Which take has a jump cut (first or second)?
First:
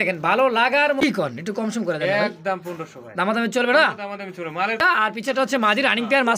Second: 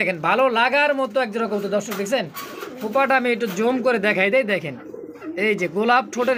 first